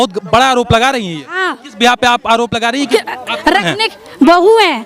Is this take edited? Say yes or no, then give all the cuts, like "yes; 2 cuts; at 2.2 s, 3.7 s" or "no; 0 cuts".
yes; 1 cut; at 2.9 s